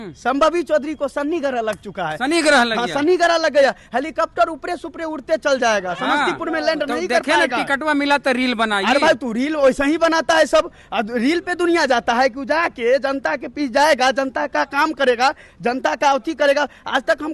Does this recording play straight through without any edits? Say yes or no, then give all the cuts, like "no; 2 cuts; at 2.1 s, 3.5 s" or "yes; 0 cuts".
yes; 0 cuts